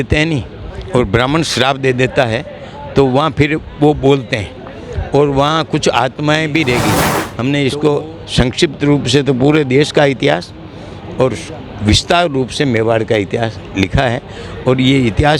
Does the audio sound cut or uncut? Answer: cut